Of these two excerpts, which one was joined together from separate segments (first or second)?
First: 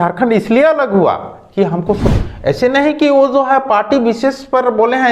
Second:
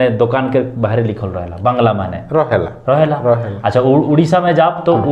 first